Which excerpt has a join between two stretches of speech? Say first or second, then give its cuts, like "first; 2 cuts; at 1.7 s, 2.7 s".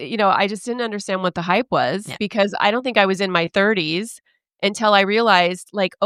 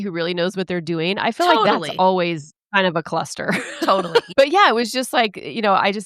second; 1 cut; at 4.3 s